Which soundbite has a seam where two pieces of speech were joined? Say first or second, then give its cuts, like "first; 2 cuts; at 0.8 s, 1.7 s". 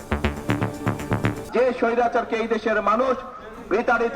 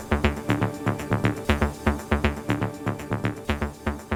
first; 1 cut; at 1.4 s